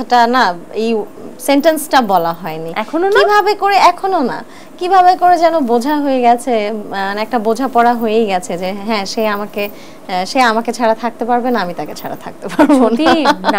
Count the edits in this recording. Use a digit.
0